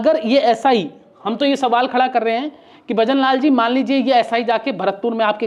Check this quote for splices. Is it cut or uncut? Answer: uncut